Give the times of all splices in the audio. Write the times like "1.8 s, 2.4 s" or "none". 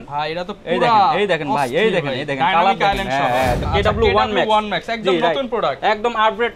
3.7 s

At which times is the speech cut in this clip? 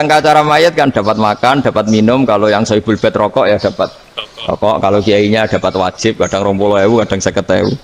none

